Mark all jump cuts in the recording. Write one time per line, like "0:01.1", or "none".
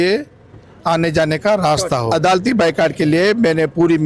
0:02.1